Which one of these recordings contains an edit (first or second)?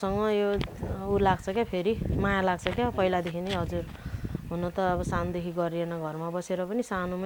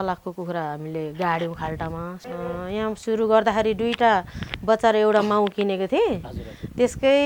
second